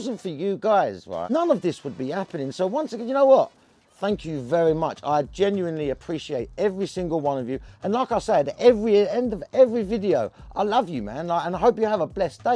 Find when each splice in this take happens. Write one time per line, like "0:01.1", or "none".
0:01.3